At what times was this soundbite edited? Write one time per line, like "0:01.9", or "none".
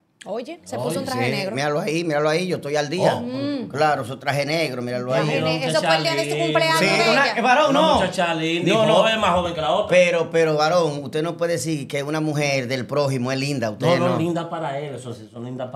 none